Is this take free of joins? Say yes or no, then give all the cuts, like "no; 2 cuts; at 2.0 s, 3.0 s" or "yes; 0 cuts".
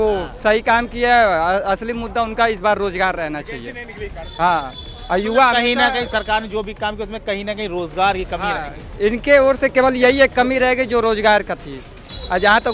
yes; 0 cuts